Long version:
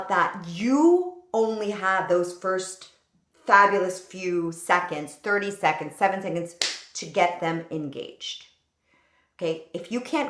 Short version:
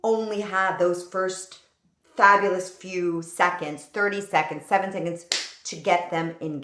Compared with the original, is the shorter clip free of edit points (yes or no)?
yes